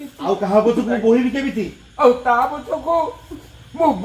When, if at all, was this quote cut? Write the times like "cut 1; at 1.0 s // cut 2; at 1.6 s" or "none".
none